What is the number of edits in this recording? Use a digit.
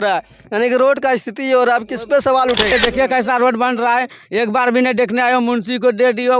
1